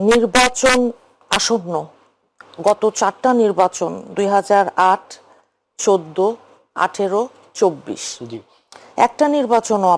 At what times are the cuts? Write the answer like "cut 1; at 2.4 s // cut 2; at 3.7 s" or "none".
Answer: none